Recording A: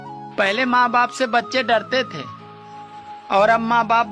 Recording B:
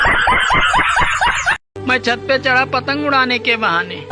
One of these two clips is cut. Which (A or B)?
B